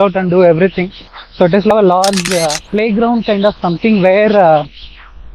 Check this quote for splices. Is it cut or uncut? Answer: cut